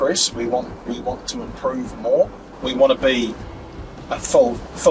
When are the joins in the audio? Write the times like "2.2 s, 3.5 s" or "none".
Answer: 2.5 s